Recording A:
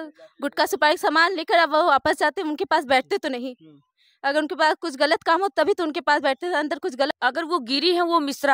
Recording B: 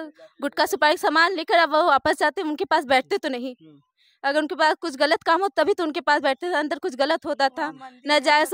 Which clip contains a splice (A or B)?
A